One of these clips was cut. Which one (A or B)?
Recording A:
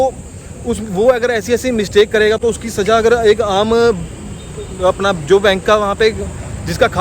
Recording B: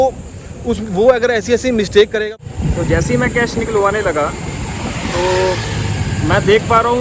B